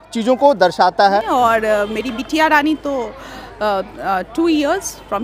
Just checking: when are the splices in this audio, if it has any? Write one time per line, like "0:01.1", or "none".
0:01.2